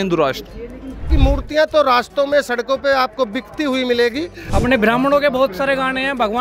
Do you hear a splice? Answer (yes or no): yes